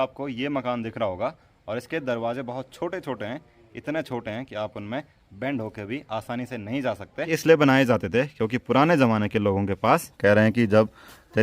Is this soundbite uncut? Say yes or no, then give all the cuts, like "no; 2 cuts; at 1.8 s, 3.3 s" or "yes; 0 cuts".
no; 2 cuts; at 7.3 s, 10.1 s